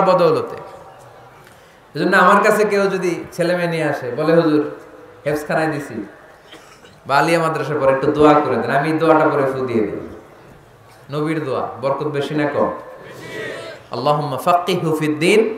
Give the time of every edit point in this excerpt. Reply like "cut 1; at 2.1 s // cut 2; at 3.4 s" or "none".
none